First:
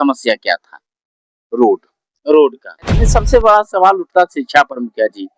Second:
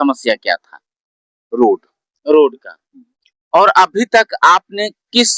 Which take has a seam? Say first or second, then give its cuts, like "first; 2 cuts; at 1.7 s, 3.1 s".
first; 1 cut; at 3.0 s